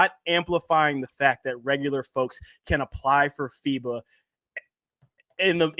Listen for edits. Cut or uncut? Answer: uncut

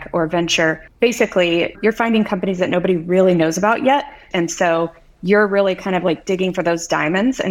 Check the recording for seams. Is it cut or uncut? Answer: cut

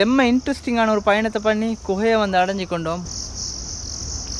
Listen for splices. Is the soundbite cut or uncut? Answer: cut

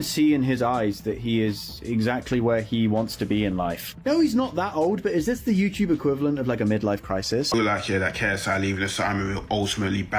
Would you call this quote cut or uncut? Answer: cut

